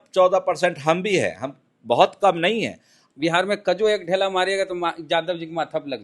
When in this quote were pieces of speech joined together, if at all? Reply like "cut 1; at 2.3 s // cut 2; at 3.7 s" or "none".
cut 1; at 3.0 s